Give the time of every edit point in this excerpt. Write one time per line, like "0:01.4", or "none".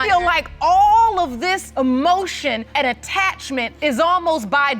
0:01.6
0:02.7
0:03.7